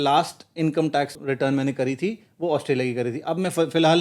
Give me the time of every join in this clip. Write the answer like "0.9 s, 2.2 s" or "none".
1.2 s